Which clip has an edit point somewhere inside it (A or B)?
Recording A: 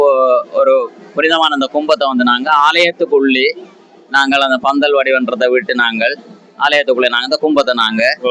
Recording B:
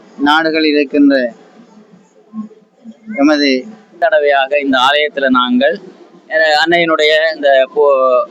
B